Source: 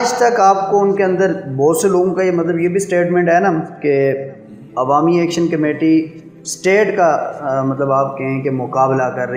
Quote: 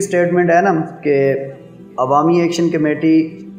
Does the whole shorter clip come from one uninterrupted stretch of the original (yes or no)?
yes